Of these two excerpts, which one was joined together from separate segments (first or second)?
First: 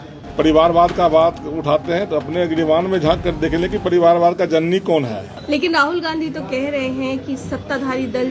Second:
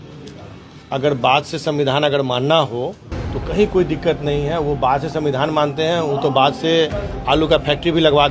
first